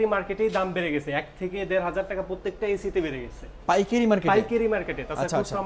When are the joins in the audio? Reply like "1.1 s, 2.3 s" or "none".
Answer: none